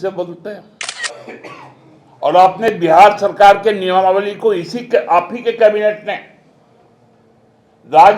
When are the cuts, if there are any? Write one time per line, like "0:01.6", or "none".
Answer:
0:01.0